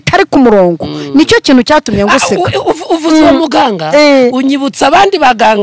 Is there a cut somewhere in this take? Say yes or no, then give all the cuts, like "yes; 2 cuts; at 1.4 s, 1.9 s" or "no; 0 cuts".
no; 0 cuts